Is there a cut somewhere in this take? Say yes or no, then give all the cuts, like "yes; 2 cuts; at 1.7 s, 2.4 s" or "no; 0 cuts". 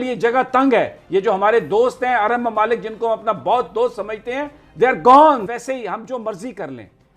yes; 1 cut; at 5.4 s